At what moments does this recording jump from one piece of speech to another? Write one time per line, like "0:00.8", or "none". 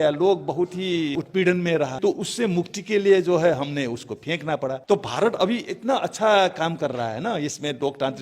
0:01.1
0:01.9
0:04.8